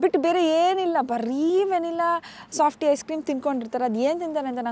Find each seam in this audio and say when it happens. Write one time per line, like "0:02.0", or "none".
none